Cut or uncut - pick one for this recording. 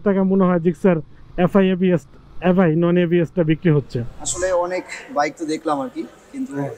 cut